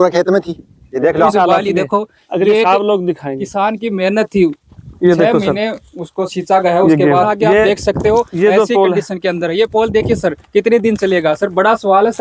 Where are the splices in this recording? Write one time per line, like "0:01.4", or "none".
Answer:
0:01.3
0:07.3